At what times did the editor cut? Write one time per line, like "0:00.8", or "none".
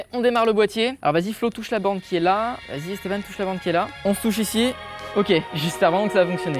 0:01.0
0:02.7
0:03.9
0:05.5

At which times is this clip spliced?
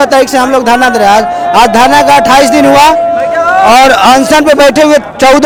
none

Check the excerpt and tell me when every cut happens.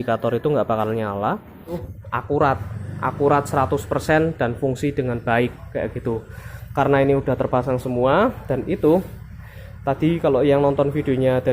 0:01.9

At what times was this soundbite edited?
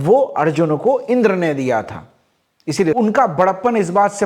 0:02.9

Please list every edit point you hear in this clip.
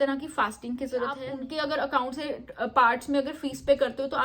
0:01.2

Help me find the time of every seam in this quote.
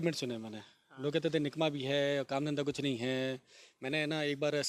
none

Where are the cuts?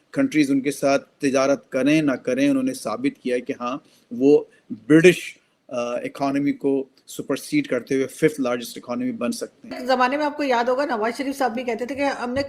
0:09.8

